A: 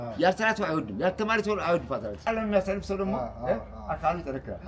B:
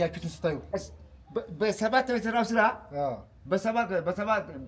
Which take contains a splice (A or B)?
A